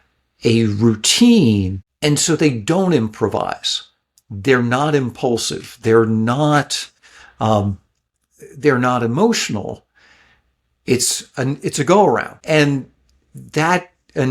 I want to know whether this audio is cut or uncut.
cut